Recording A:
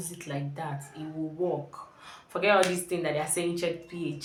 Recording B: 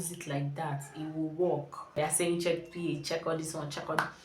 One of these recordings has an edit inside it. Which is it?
B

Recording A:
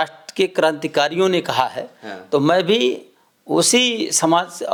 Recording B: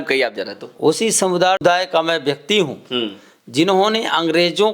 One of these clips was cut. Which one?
B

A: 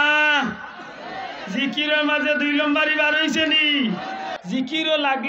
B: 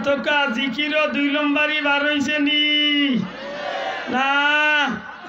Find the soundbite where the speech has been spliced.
A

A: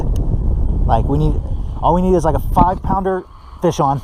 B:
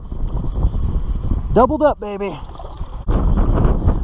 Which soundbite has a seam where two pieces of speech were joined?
B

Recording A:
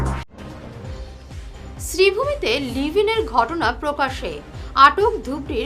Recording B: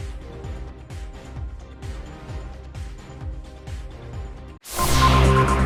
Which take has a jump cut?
A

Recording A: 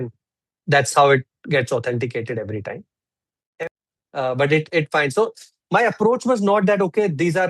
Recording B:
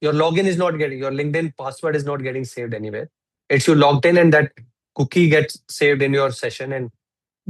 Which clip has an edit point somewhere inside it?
A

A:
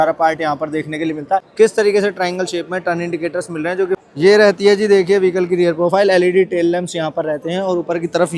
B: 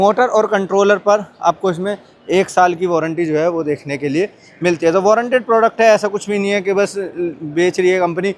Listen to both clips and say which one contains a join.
A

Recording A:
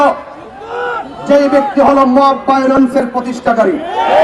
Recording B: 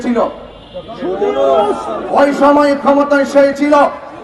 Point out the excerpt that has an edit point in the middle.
B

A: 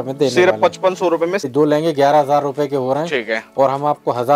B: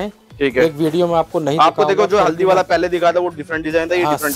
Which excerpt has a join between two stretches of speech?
A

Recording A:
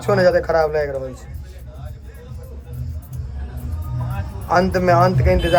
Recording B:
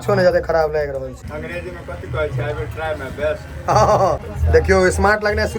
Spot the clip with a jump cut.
B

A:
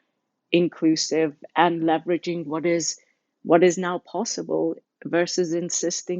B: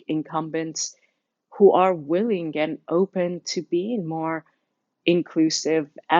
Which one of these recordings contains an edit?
A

